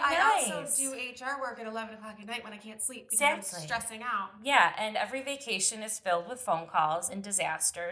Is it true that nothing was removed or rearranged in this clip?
yes; 0 cuts

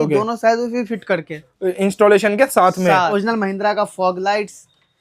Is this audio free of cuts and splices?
no; 1 cut; at 3.1 s

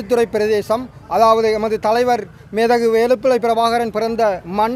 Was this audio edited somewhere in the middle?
no; 0 cuts

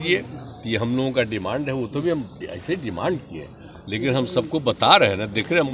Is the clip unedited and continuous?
yes; 0 cuts

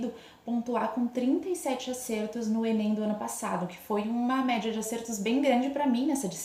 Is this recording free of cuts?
yes; 0 cuts

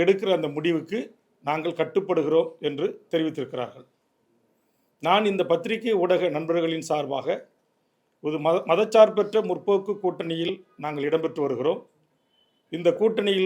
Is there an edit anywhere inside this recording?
no; 0 cuts

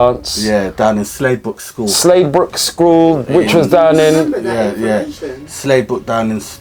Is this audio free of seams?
yes; 0 cuts

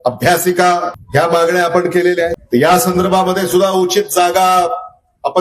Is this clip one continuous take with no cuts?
no; 2 cuts; at 1.0 s, 2.4 s

